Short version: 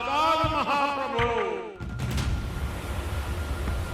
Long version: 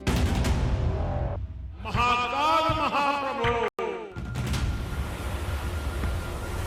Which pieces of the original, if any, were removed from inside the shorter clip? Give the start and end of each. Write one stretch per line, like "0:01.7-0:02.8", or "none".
0:03.7-0:03.8